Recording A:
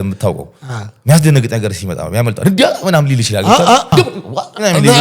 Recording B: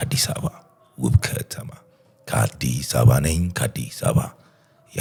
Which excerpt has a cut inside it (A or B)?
A